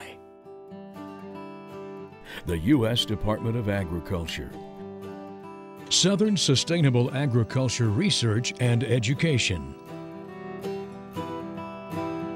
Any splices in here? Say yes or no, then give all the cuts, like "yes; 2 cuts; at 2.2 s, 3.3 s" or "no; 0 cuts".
yes; 1 cut; at 9.7 s